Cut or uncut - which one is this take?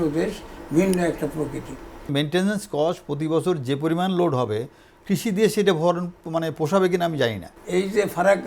cut